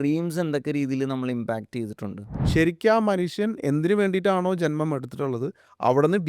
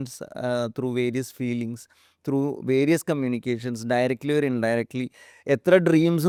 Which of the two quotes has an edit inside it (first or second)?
first